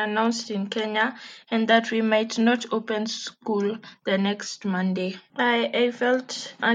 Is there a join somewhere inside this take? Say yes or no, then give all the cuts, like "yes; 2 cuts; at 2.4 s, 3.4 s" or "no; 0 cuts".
no; 0 cuts